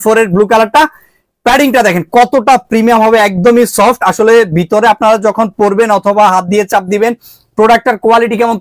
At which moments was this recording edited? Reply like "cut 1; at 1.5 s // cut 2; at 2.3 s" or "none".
none